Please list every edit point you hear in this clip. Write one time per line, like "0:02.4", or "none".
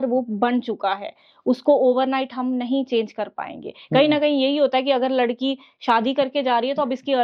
none